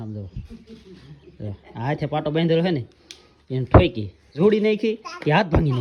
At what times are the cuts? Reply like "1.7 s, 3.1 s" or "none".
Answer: none